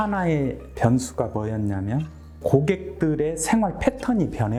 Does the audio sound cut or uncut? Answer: uncut